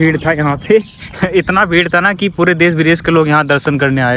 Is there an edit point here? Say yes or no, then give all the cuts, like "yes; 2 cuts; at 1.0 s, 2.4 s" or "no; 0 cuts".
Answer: no; 0 cuts